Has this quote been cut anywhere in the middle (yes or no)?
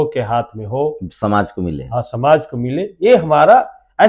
no